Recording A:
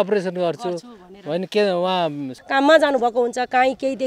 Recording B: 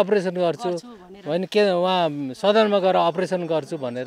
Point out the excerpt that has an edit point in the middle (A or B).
A